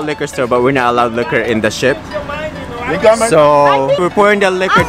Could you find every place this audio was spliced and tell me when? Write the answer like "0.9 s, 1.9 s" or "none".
4.0 s